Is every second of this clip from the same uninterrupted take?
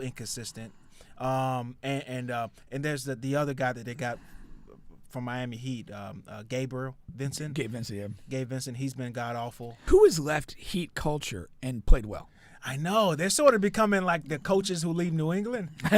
no; 1 cut; at 9.9 s

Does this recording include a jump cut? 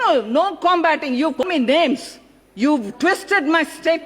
yes; 1 cut; at 1.4 s

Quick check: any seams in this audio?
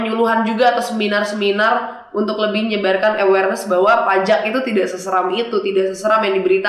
no; 0 cuts

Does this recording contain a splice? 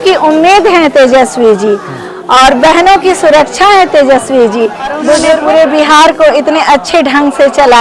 yes; 1 cut; at 5.3 s

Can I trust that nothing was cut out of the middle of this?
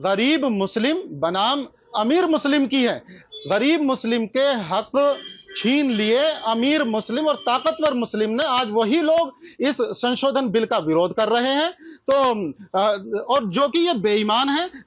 yes; 0 cuts

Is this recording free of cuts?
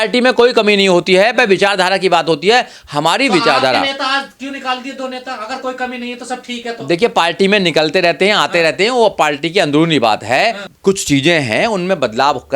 no; 1 cut; at 10.7 s

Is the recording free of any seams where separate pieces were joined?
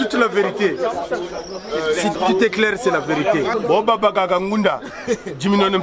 no; 1 cut; at 3.5 s

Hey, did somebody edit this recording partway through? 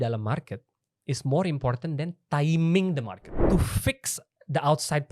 yes; 1 cut; at 3.3 s

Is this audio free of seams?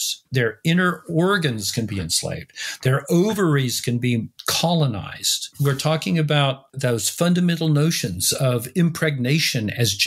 yes; 0 cuts

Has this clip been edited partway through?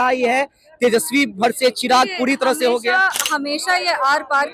no; 0 cuts

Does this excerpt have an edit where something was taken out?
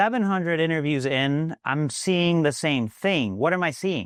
no; 0 cuts

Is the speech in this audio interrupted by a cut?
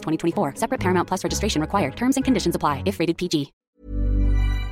yes; 1 cut; at 3.8 s

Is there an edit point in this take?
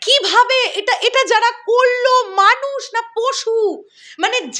no; 0 cuts

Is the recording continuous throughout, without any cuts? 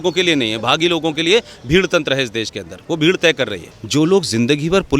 no; 1 cut; at 3.6 s

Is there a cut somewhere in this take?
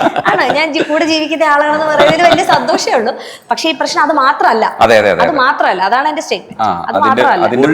no; 0 cuts

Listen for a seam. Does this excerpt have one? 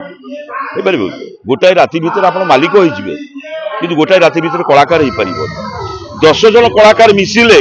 no; 0 cuts

